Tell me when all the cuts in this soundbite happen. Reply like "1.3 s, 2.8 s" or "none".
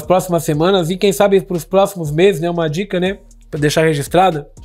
none